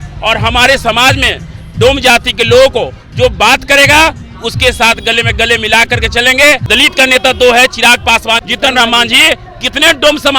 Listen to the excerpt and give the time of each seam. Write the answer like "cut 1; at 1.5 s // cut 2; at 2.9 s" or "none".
cut 1; at 6.6 s // cut 2; at 8.4 s

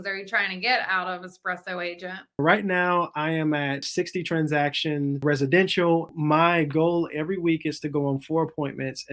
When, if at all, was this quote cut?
cut 1; at 2.4 s // cut 2; at 3.9 s // cut 3; at 5.2 s // cut 4; at 6.1 s

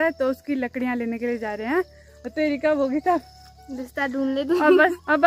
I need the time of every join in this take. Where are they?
none

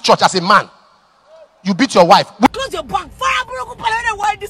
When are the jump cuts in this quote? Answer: cut 1; at 2.5 s

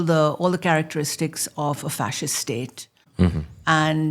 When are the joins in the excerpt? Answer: cut 1; at 3.0 s

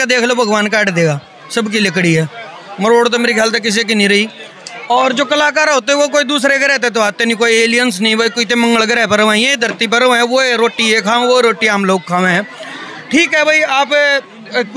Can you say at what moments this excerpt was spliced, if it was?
none

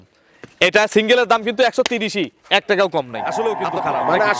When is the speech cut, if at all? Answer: cut 1; at 3.2 s

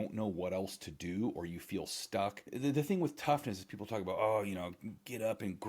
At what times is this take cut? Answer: cut 1; at 2.5 s

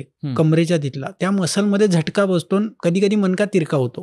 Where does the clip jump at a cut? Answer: cut 1; at 1.1 s // cut 2; at 2.7 s

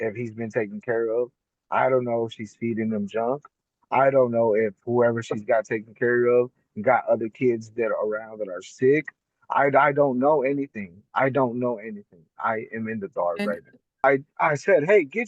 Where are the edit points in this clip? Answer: cut 1; at 14.0 s

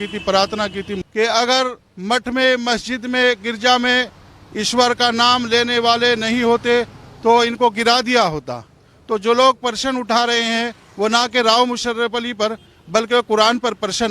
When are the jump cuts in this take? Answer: cut 1; at 0.9 s

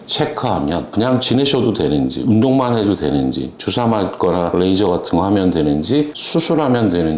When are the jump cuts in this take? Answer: none

